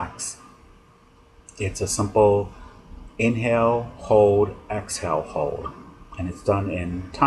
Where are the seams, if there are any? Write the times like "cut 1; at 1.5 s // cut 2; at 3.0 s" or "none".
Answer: cut 1; at 3.5 s